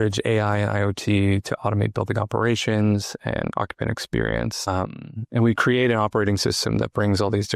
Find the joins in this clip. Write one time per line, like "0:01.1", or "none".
none

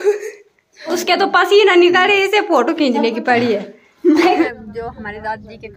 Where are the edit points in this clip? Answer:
0:00.9
0:04.4

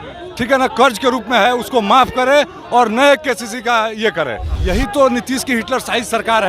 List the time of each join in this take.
0:04.5

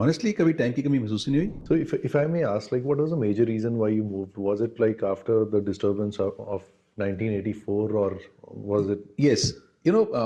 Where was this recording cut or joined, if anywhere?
0:01.6

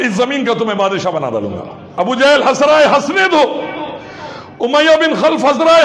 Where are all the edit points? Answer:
0:01.8

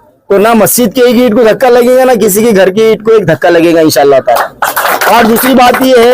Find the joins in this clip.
0:04.8

